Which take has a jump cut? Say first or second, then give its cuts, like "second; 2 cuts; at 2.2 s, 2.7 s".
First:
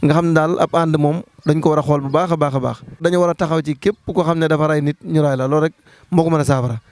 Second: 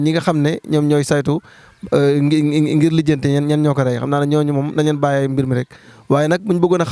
first; 1 cut; at 3.0 s